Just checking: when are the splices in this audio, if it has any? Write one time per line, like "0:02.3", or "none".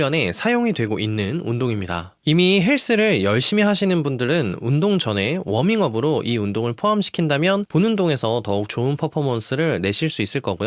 0:02.1